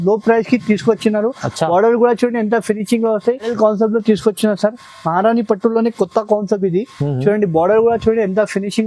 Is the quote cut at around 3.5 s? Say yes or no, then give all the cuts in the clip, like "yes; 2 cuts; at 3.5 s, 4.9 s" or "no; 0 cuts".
yes; 1 cut; at 3.5 s